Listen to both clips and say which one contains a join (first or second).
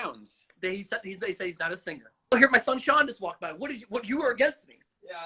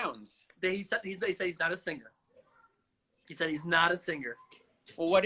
first